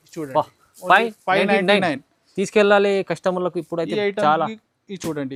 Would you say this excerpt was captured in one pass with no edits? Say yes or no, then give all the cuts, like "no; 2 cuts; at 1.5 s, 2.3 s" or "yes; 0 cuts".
yes; 0 cuts